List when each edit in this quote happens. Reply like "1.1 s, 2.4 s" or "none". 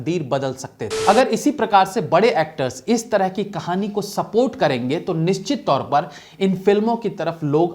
0.9 s